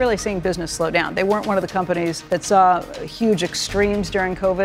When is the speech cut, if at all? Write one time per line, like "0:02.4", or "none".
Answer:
0:02.2

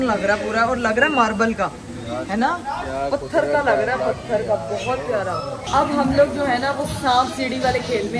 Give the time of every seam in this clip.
none

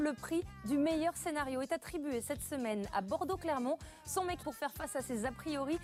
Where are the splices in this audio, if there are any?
none

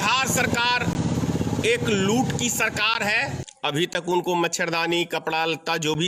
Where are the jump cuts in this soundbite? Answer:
0:03.4

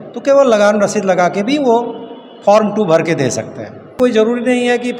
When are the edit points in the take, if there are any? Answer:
0:04.0

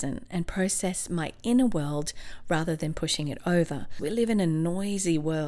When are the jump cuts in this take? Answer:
0:04.0

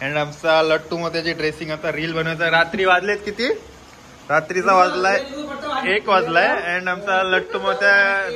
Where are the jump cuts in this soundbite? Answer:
none

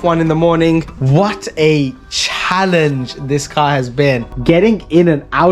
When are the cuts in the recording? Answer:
0:00.9
0:04.3

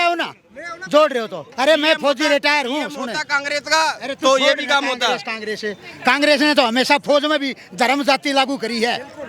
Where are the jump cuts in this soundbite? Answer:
0:01.4

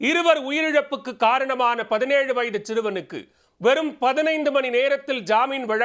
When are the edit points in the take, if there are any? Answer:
none

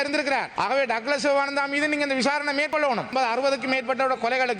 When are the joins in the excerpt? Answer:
0:02.8

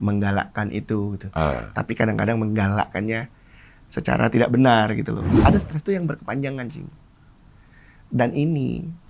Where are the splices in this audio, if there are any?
0:05.3

